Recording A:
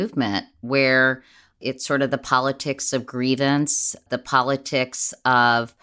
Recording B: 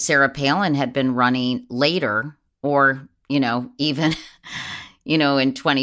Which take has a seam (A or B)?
A